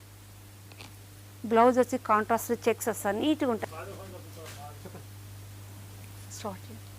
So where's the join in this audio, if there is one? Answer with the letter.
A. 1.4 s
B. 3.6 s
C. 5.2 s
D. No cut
B